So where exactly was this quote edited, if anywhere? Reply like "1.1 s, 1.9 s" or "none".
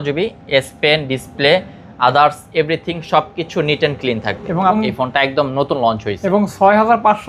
4.7 s